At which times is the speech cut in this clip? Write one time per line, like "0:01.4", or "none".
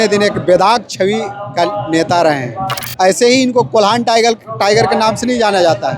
0:02.8